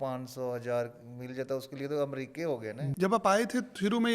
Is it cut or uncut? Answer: cut